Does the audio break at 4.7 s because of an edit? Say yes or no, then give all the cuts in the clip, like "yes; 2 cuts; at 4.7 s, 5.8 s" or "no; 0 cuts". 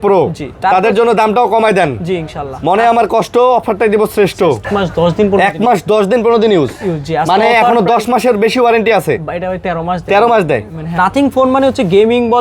yes; 2 cuts; at 4.7 s, 11.0 s